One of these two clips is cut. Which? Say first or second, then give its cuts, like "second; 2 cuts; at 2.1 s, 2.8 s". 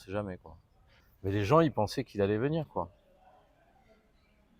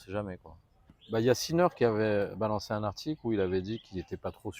second; 1 cut; at 1.0 s